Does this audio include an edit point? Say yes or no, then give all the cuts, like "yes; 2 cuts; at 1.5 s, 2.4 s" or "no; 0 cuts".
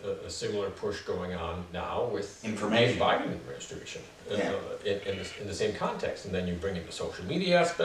yes; 2 cuts; at 1.7 s, 2.3 s